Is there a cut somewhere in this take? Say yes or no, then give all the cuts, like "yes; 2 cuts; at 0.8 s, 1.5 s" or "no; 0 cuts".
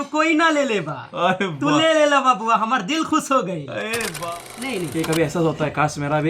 yes; 1 cut; at 4.2 s